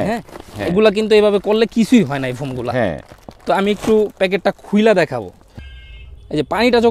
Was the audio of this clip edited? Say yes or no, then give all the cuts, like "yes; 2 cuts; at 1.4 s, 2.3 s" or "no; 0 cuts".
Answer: yes; 1 cut; at 5.5 s